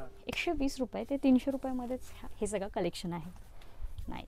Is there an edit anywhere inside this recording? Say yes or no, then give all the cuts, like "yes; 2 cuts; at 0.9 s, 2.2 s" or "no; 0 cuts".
no; 0 cuts